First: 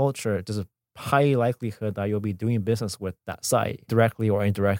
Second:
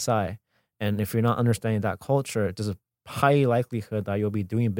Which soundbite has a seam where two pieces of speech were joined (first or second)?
first